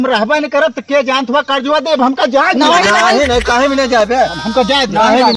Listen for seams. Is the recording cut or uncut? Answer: uncut